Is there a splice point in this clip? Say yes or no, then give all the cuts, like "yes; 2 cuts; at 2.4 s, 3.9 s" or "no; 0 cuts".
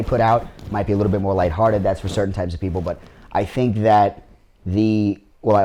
no; 0 cuts